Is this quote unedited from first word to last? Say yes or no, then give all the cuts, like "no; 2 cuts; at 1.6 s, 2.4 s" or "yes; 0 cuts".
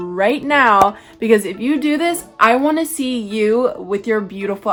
yes; 0 cuts